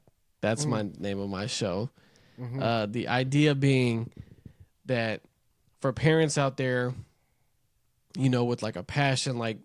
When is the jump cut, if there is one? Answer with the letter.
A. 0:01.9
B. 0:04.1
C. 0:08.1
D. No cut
D